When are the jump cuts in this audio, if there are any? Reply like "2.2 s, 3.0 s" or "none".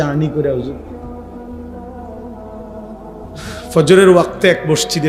0.9 s, 3.6 s